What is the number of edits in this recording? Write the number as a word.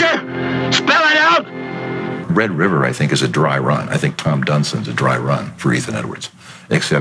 one